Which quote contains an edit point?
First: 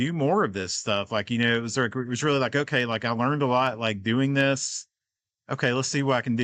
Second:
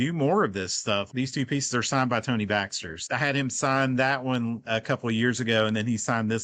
second; 2 cuts; at 1.1 s, 3.0 s

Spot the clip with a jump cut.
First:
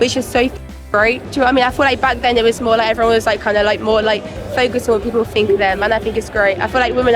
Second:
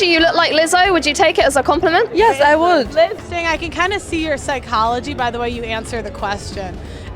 second; 1 cut; at 3.2 s

